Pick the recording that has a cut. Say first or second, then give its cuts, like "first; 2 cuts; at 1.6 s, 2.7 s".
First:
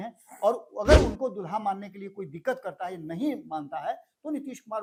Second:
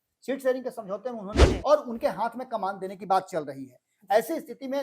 second; 1 cut; at 1.5 s